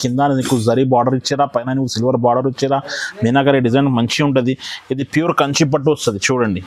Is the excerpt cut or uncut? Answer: uncut